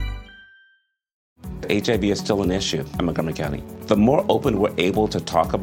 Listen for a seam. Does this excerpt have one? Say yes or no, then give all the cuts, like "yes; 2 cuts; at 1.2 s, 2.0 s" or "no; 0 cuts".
yes; 1 cut; at 1.3 s